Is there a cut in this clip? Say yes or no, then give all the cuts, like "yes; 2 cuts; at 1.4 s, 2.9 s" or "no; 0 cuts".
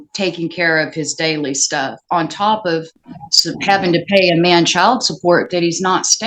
no; 0 cuts